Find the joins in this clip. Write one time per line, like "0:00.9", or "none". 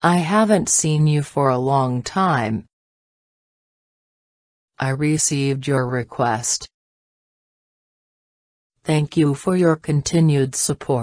0:01.2